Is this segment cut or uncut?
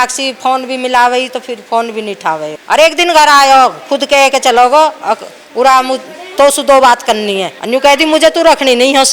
cut